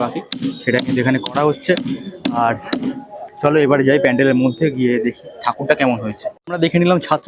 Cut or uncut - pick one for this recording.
cut